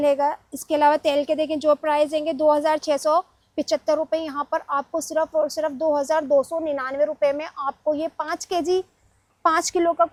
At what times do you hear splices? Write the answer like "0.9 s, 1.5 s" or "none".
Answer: none